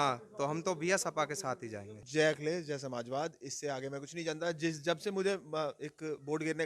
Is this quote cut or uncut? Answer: cut